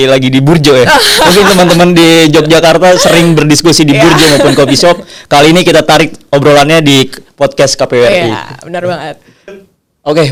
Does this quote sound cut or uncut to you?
uncut